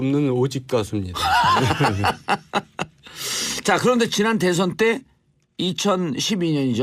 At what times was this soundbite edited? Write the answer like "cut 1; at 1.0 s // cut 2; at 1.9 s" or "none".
cut 1; at 4.7 s